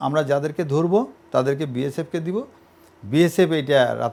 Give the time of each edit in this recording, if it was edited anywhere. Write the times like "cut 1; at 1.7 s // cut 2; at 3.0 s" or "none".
none